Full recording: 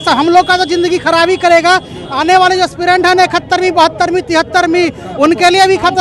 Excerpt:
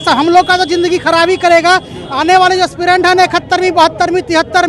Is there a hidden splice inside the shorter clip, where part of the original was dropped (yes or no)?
no